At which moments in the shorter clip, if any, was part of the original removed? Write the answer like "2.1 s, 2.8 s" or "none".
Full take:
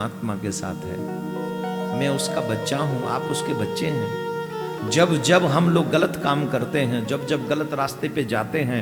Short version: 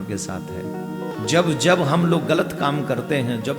1.1 s